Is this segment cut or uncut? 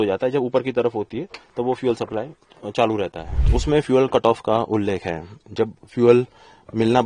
cut